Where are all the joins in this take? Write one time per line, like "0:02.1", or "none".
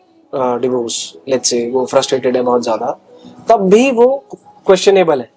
none